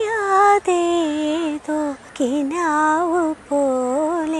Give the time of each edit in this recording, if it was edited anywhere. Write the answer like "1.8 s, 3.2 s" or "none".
2.0 s